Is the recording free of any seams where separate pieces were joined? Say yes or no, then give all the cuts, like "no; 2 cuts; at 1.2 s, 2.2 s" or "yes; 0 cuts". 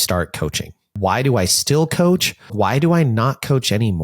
no; 2 cuts; at 0.9 s, 2.5 s